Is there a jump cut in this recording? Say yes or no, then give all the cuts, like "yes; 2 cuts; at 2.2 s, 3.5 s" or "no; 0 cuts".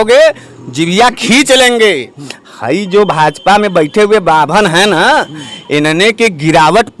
no; 0 cuts